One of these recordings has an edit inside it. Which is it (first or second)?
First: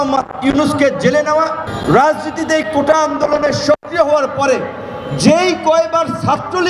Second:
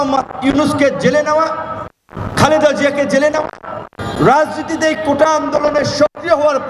first